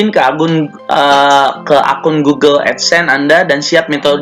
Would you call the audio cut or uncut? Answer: uncut